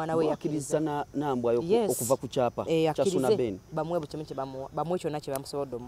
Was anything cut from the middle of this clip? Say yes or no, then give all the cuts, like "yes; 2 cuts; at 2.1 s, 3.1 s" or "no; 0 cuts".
no; 0 cuts